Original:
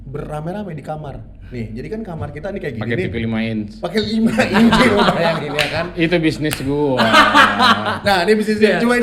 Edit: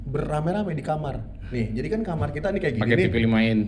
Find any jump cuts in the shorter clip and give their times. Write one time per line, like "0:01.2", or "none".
none